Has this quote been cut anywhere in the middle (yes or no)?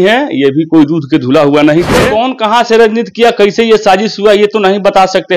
yes